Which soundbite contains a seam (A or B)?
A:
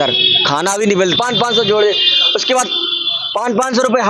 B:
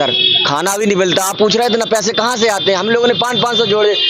A